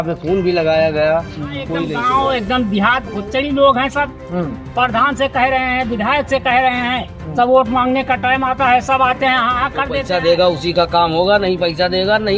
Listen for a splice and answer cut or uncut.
cut